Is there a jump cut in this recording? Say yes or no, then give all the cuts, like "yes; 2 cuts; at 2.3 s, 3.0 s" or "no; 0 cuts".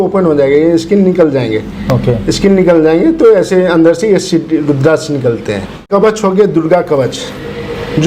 no; 0 cuts